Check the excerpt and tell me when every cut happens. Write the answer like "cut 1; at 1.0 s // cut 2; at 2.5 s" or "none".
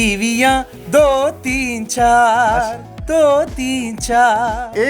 none